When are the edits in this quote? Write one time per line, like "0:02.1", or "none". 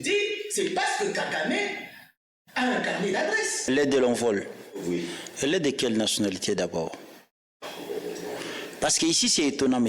0:03.7

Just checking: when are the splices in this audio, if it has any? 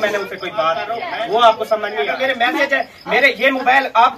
0:00.9
0:02.1

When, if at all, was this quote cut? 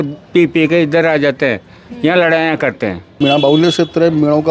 0:03.2

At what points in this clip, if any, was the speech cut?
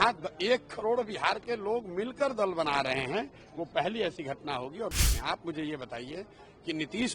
0:04.9

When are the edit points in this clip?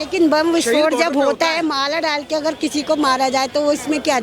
none

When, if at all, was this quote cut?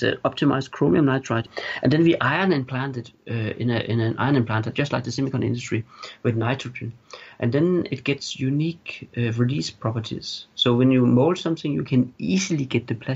0:01.4

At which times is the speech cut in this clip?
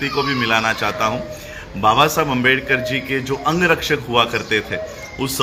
none

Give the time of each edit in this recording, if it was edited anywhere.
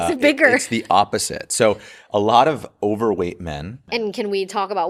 none

